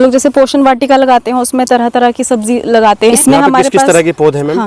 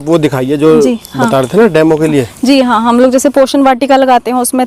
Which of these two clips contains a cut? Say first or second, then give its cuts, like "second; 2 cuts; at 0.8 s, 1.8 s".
first; 1 cut; at 3.1 s